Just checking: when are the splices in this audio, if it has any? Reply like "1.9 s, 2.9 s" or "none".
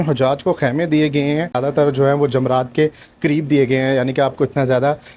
1.6 s